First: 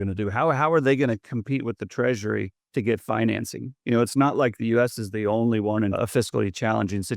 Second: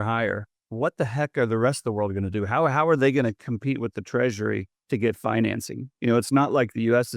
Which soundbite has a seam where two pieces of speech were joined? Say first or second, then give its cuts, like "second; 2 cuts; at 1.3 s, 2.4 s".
first; 1 cut; at 5.9 s